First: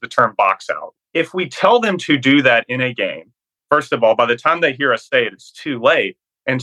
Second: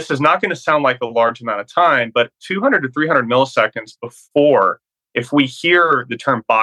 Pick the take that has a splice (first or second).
first